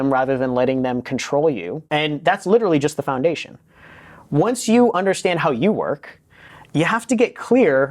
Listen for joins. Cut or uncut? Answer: cut